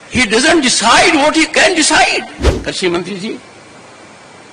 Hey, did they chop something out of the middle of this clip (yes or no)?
yes